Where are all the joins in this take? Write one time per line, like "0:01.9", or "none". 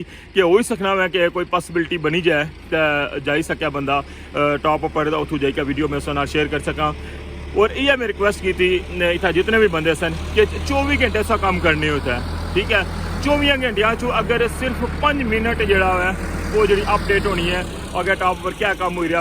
none